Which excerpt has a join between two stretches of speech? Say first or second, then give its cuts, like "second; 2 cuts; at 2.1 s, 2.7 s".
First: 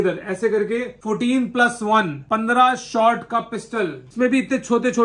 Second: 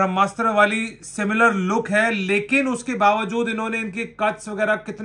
first; 3 cuts; at 0.9 s, 2.2 s, 4.0 s